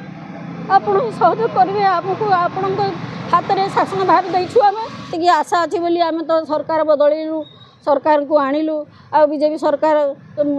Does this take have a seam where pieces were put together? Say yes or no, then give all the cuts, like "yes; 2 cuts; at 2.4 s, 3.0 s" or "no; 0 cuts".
yes; 1 cut; at 5.1 s